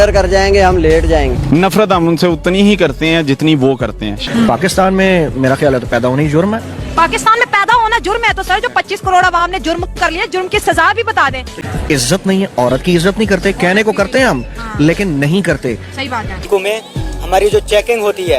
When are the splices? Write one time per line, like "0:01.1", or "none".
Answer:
0:01.4
0:04.2
0:11.6
0:16.4